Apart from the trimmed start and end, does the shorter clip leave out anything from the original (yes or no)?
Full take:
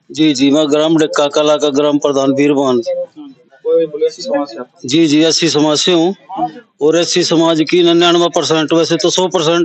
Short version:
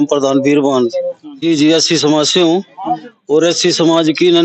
yes